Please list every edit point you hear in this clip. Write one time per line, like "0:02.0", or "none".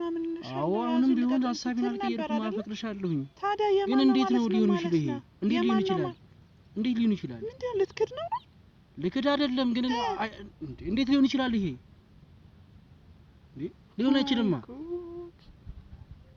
none